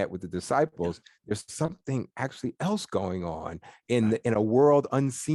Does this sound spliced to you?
no; 0 cuts

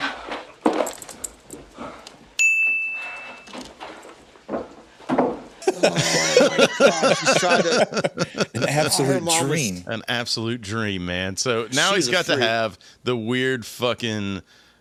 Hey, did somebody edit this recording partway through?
no; 0 cuts

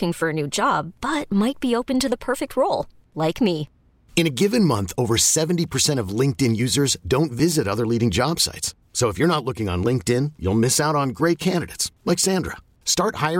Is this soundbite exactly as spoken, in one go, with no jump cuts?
yes; 0 cuts

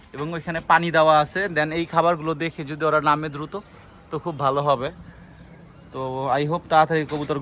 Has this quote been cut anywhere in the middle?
no; 0 cuts

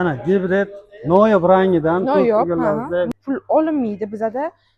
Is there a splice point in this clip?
yes; 1 cut; at 3.1 s

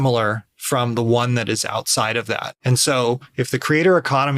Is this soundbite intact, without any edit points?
no; 1 cut; at 2.5 s

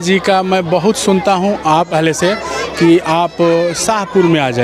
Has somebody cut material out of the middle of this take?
yes; 1 cut; at 1.9 s

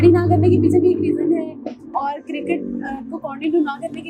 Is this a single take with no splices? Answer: yes; 0 cuts

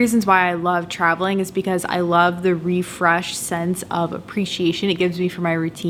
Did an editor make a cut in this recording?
no; 0 cuts

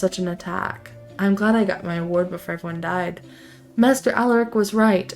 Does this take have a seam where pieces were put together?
no; 0 cuts

